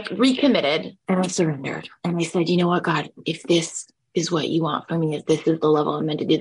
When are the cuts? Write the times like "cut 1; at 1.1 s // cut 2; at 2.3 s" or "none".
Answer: cut 1; at 0.9 s